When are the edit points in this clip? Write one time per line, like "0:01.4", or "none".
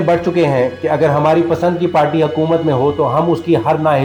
none